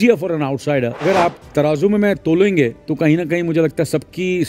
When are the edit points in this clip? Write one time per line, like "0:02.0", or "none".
0:01.0
0:02.8